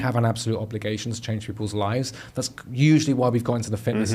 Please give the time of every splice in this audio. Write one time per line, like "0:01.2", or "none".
none